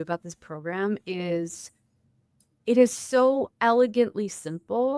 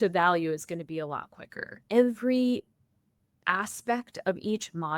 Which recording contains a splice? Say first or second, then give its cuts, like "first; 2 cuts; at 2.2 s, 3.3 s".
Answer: second; 1 cut; at 1.7 s